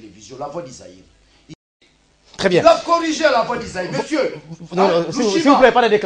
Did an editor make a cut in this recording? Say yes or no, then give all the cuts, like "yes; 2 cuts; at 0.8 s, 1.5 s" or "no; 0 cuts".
yes; 1 cut; at 1.6 s